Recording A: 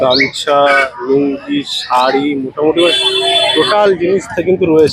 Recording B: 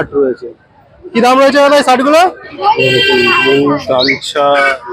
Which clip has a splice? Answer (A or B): B